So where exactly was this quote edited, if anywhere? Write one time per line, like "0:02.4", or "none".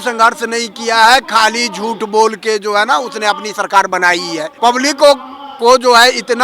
0:04.5